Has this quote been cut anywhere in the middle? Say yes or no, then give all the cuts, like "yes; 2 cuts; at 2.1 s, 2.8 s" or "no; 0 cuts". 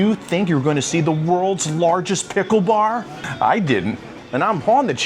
yes; 2 cuts; at 3.2 s, 4.1 s